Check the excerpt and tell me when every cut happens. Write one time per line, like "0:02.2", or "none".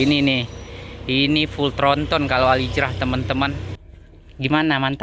0:03.7